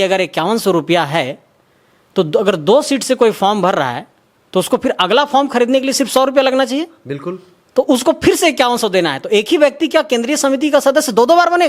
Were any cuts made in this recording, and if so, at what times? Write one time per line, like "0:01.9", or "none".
none